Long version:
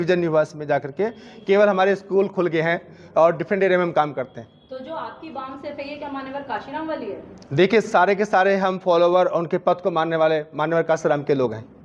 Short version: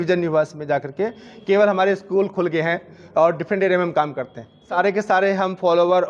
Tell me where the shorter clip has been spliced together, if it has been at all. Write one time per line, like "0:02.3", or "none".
0:04.8